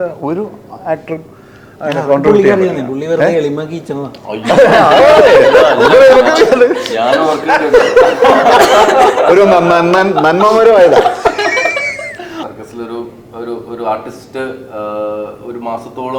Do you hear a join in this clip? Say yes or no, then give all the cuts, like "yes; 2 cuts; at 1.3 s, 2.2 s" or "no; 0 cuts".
yes; 1 cut; at 12.4 s